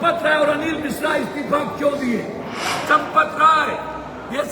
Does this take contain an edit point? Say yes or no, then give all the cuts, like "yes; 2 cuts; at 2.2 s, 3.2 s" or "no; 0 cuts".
yes; 1 cut; at 2.8 s